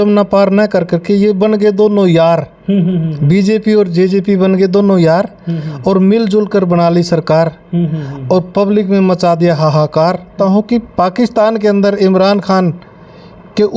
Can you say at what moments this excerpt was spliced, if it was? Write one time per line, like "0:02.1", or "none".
0:10.3